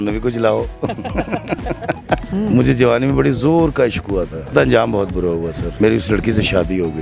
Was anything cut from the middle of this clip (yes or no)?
yes